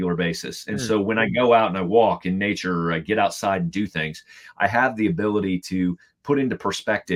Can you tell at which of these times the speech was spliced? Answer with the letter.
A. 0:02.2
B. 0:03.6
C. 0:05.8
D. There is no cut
D